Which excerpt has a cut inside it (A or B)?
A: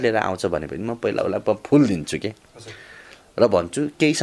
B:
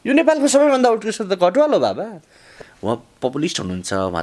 B